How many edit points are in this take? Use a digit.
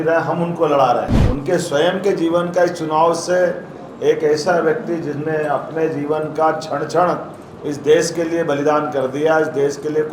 1